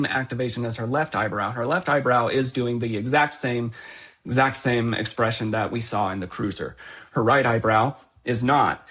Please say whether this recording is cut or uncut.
uncut